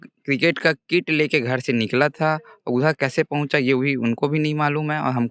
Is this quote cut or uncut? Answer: uncut